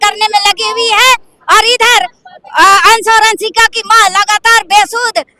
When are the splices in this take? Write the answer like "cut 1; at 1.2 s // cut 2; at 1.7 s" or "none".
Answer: none